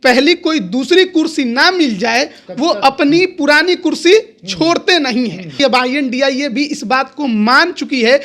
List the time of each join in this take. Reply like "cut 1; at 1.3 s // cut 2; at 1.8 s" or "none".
cut 1; at 5.5 s